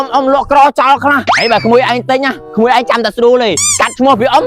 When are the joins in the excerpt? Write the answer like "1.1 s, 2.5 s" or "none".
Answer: 1.3 s, 2.4 s, 3.6 s